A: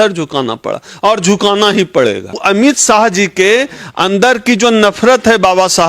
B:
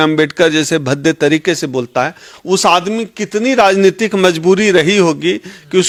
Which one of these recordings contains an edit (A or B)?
A